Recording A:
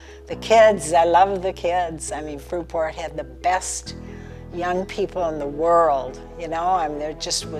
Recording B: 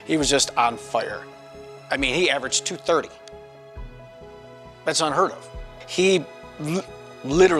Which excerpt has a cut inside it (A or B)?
B